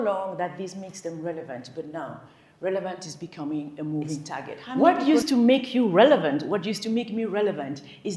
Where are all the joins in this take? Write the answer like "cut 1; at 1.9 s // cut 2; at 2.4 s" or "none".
cut 1; at 4.8 s